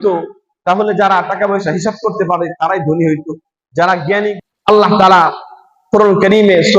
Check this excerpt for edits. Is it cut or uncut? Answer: cut